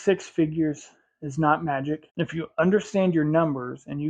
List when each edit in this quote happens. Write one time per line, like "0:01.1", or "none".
0:02.1